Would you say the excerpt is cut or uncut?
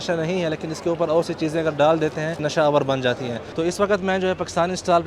cut